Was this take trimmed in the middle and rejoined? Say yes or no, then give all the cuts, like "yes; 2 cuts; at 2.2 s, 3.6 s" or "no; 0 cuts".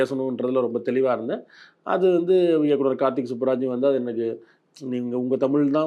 no; 0 cuts